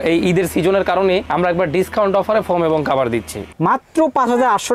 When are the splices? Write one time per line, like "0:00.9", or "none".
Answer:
0:03.5

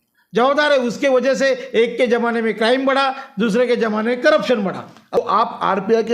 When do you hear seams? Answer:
0:05.2

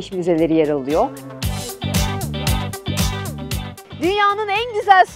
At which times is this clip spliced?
0:01.2
0:03.4

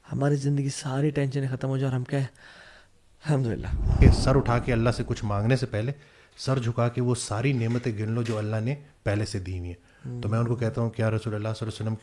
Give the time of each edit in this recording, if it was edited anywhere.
0:04.0

